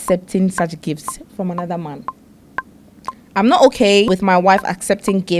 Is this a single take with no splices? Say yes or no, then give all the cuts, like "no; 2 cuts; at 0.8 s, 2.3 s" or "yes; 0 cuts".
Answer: no; 1 cut; at 4.1 s